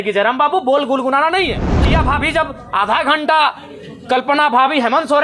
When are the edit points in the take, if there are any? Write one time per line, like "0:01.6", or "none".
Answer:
0:01.9

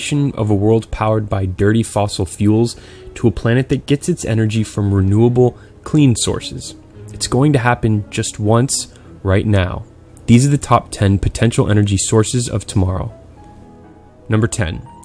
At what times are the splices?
0:10.2

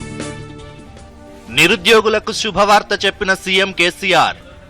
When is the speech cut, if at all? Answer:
0:01.3

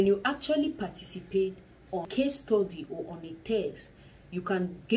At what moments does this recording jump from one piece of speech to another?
0:02.1

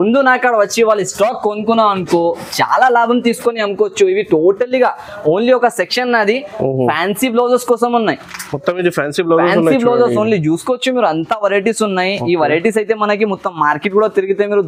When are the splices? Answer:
none

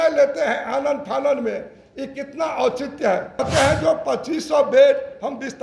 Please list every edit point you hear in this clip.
0:03.4

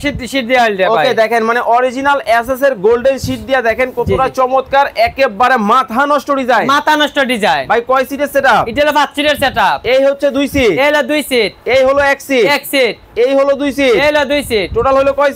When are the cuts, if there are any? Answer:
none

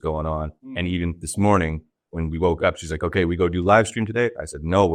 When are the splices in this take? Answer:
none

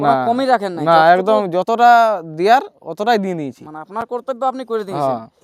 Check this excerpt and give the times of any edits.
none

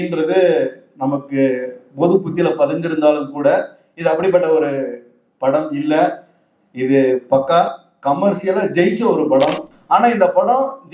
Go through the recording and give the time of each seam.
0:09.7

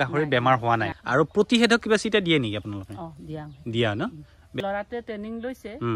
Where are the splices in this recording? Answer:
0:00.9
0:04.6

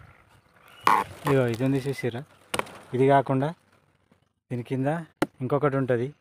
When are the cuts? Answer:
0:05.1

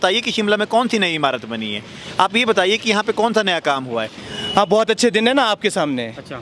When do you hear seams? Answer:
0:04.2

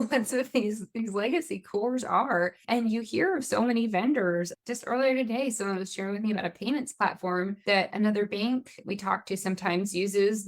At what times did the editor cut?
0:02.6
0:04.5
0:07.9
0:08.8

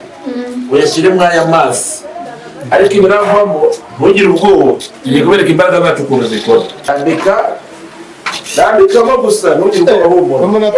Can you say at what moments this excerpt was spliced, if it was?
0:06.9

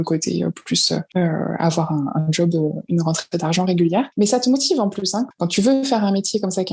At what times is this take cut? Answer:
0:01.1
0:04.1
0:05.3

